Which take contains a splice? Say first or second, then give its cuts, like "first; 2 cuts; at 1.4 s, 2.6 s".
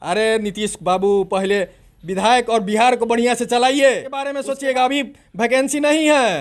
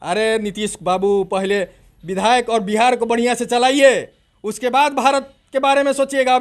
first; 1 cut; at 4.4 s